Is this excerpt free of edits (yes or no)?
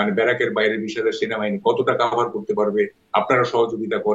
yes